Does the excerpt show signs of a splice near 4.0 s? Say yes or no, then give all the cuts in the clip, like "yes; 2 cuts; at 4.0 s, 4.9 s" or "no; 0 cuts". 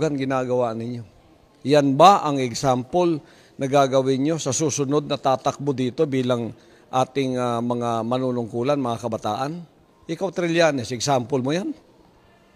yes; 1 cut; at 4.0 s